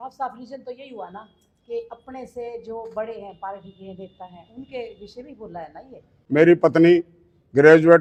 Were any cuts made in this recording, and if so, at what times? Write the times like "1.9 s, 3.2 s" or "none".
none